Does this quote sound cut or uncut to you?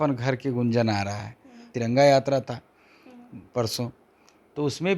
cut